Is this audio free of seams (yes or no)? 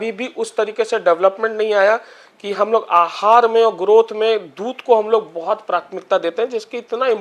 yes